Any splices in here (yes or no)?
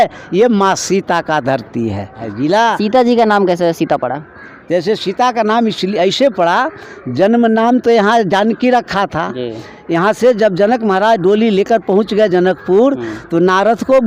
yes